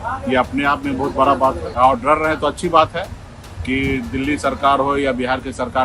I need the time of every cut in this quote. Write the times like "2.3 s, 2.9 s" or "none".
1.7 s